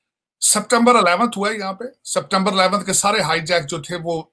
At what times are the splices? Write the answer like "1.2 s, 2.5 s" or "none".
none